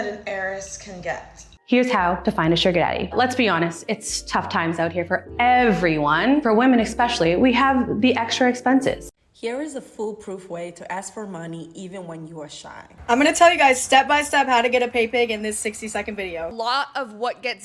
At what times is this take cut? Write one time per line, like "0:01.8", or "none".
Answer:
0:16.5